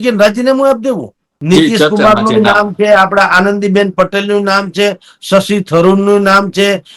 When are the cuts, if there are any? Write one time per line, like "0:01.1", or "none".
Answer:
0:01.3